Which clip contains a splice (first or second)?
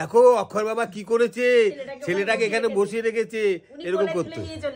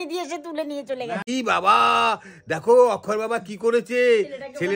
second